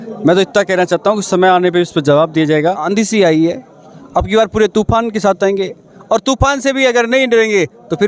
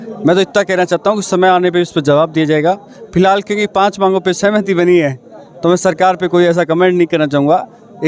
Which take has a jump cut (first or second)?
first